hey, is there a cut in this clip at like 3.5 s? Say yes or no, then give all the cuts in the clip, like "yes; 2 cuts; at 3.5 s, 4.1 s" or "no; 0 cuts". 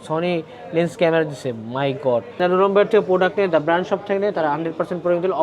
no; 1 cut; at 2.3 s